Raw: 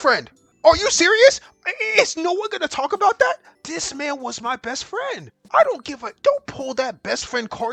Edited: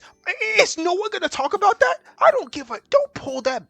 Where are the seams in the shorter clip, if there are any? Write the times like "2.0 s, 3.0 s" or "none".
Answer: 2.1 s

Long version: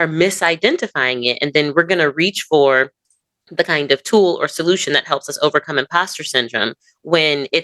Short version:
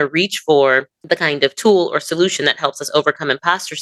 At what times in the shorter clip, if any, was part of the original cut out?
0.9 s

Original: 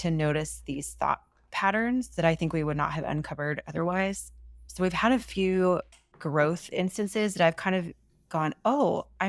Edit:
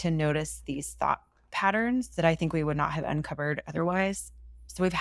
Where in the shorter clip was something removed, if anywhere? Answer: none

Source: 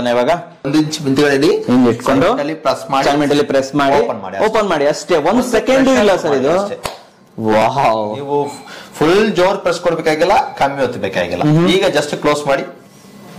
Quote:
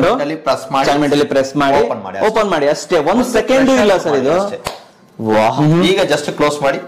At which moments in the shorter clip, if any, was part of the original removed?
5.4 s

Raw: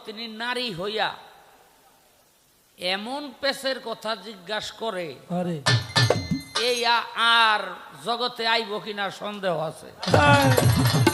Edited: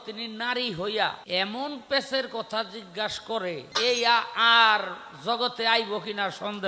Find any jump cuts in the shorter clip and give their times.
1.2 s, 3.7 s

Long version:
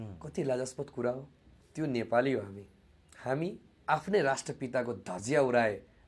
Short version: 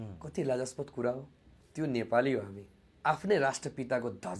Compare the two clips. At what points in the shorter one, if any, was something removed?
2.8 s

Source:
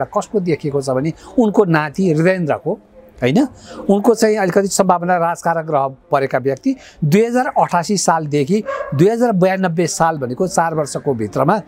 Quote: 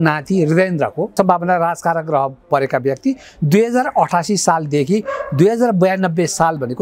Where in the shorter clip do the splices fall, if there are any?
1.1 s

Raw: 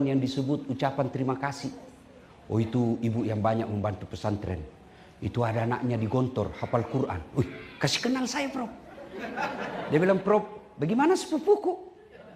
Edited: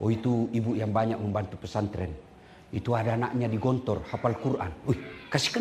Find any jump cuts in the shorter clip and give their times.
none

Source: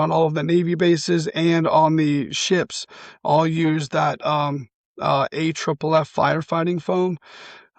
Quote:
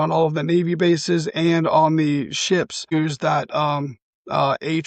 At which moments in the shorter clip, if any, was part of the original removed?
2.9 s

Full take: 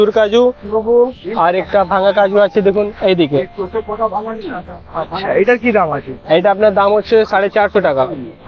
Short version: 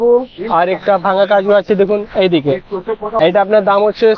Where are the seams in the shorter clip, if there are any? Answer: 3.1 s

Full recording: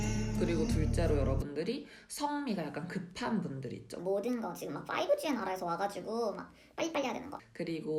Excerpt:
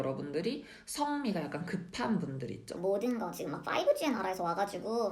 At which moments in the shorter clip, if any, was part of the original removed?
none

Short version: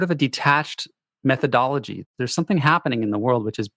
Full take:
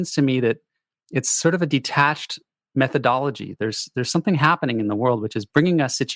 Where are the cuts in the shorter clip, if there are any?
2.0 s

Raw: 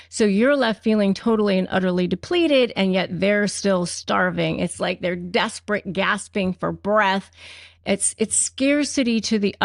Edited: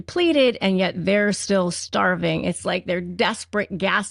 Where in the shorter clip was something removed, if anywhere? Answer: none

